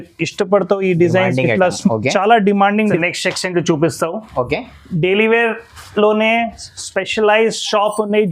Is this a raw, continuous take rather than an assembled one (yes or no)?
no